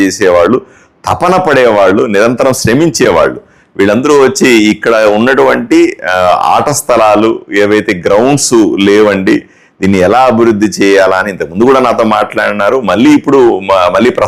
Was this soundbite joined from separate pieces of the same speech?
no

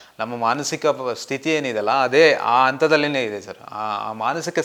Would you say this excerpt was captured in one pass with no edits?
yes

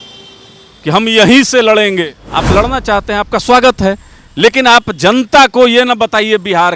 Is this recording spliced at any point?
yes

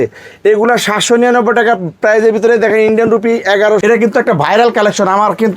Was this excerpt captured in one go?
no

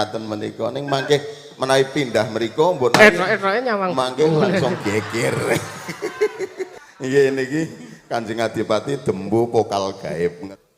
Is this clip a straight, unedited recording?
no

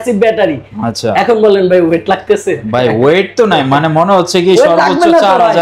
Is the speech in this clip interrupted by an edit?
no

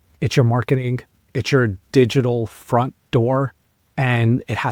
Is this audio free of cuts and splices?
yes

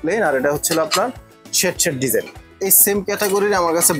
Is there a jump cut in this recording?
yes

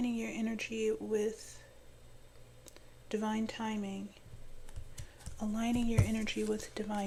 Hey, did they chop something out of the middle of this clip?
no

